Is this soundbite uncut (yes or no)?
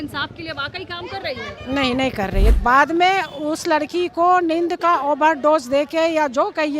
no